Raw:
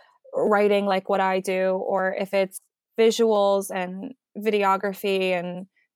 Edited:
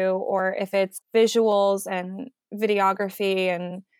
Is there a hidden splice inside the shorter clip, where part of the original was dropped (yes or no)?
yes